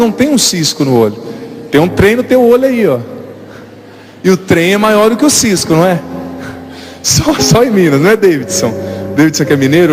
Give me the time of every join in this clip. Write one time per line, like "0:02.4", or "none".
0:03.8